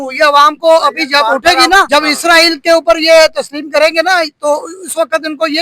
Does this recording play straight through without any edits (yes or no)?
no